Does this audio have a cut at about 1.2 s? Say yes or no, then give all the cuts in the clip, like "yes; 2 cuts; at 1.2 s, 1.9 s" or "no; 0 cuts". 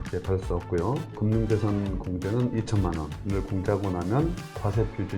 yes; 2 cuts; at 1.2 s, 3.2 s